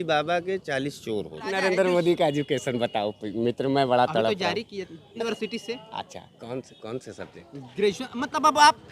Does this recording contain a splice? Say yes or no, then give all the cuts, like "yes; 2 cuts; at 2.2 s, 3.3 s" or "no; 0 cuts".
yes; 2 cuts; at 1.6 s, 5.2 s